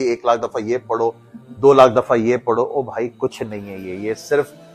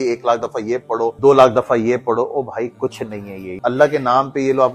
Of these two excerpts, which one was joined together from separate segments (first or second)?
second